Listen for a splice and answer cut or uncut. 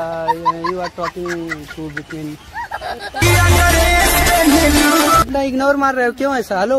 cut